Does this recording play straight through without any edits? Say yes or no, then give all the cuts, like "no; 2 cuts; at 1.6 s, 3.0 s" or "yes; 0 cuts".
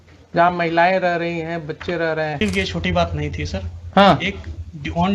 no; 1 cut; at 2.4 s